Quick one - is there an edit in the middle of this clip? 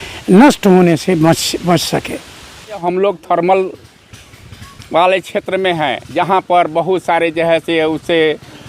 yes; 1 cut; at 2.8 s

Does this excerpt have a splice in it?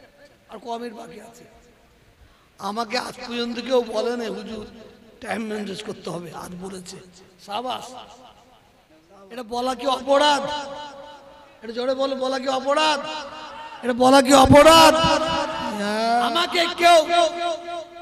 yes; 2 cuts; at 9.5 s, 16.4 s

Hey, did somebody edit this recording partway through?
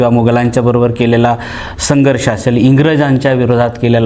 no; 0 cuts

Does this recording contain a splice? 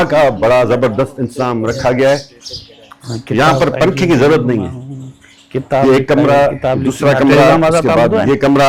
no; 0 cuts

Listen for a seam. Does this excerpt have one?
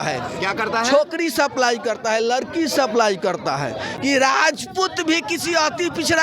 yes; 1 cut; at 3.9 s

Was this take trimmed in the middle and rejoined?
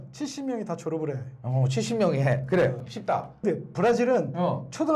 yes; 1 cut; at 3.4 s

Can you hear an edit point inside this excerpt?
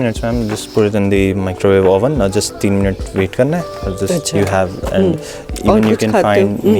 no; 0 cuts

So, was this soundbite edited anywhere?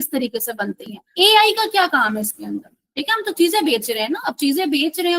yes; 1 cut; at 1.0 s

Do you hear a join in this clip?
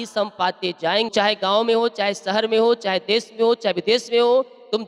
yes; 1 cut; at 1.1 s

